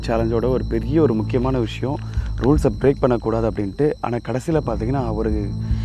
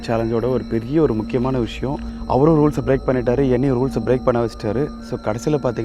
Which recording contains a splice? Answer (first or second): second